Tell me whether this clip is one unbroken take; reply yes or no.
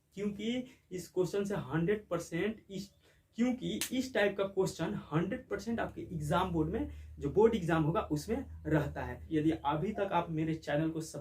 no